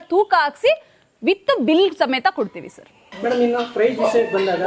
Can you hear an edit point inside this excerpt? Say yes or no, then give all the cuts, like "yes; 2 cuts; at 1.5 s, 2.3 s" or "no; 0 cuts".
no; 0 cuts